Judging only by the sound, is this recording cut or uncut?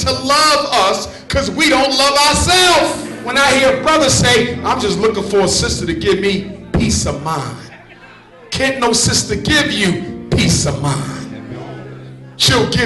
cut